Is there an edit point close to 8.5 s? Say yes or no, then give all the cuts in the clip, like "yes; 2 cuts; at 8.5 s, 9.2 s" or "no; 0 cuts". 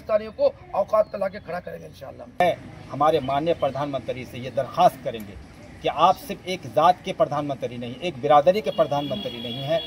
no; 1 cut; at 2.4 s